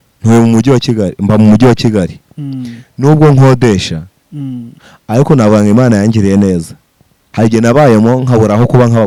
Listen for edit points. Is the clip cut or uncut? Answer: uncut